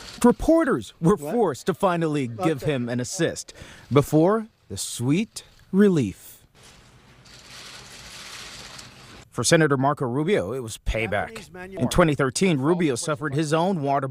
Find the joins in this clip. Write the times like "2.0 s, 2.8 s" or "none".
none